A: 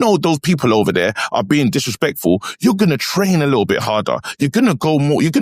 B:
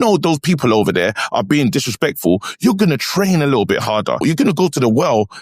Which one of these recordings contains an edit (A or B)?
B